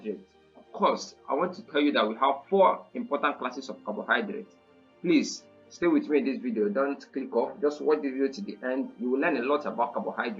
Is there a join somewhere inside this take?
no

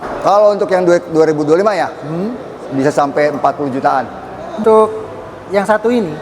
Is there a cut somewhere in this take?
yes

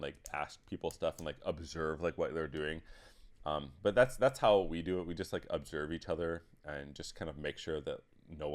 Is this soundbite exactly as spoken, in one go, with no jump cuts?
yes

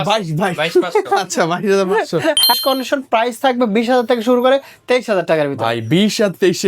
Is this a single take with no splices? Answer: no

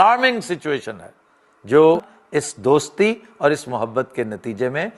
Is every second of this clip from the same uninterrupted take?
no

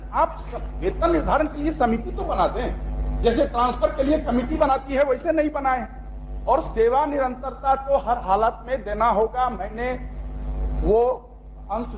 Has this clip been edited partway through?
no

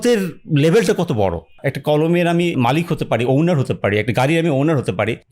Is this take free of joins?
no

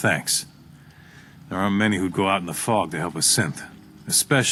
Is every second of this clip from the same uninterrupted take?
yes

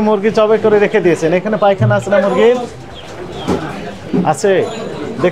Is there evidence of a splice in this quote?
no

